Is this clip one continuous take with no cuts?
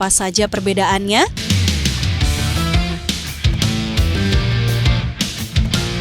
no; 1 cut; at 1.4 s

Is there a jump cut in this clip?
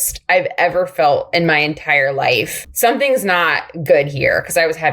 yes; 1 cut; at 2.6 s

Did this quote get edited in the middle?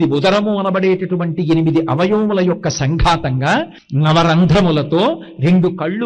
yes; 1 cut; at 3.8 s

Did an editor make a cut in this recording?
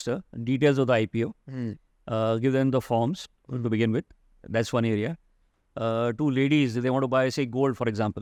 no; 0 cuts

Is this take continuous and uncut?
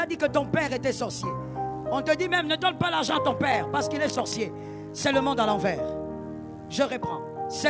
no; 1 cut; at 6.1 s

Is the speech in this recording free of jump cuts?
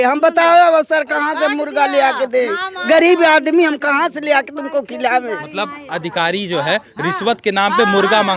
yes; 0 cuts

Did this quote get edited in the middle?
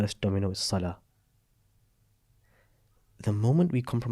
no; 0 cuts

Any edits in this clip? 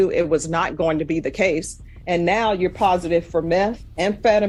no; 0 cuts

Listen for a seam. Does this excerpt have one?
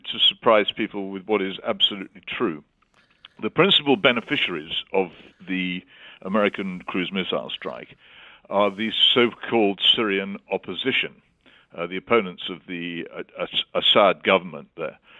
no; 0 cuts

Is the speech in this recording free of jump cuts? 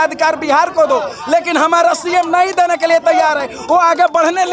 yes; 0 cuts

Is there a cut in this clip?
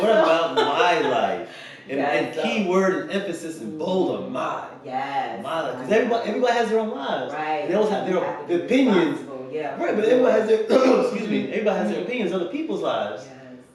no; 0 cuts

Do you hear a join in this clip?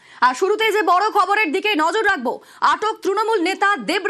no; 0 cuts

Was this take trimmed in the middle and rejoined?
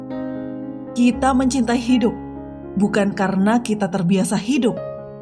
yes; 1 cut; at 0.9 s

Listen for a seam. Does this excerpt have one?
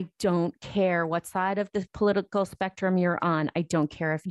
yes; 1 cut; at 1.9 s

